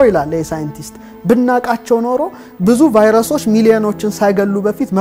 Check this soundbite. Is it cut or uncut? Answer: uncut